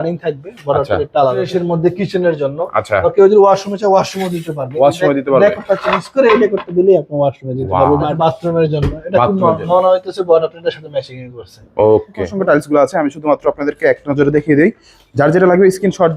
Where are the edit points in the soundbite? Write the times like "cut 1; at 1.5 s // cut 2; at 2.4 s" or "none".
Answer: cut 1; at 1.5 s // cut 2; at 8.1 s // cut 3; at 12.2 s